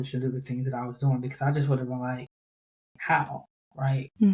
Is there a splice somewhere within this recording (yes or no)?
no